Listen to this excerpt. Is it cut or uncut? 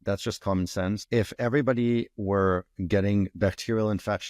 cut